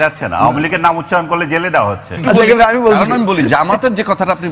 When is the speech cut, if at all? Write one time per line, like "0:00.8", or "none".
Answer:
0:02.1